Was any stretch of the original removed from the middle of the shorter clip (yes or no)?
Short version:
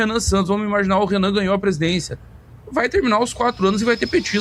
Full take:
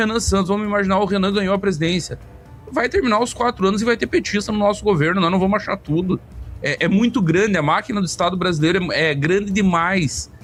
no